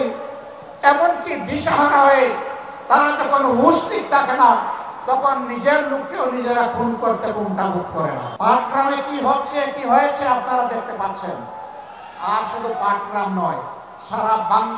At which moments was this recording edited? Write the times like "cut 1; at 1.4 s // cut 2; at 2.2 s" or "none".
cut 1; at 8.3 s